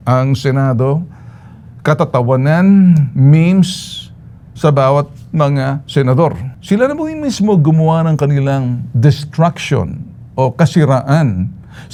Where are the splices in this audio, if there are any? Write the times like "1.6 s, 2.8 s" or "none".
none